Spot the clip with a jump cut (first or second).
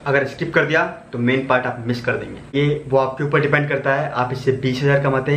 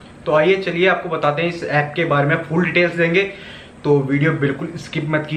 first